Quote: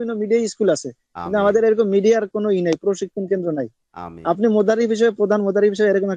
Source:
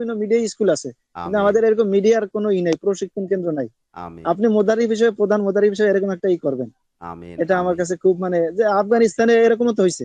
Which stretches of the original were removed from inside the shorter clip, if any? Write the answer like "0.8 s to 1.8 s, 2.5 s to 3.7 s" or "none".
none